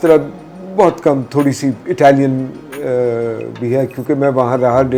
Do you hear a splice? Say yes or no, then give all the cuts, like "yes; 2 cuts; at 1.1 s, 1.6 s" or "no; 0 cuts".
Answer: no; 0 cuts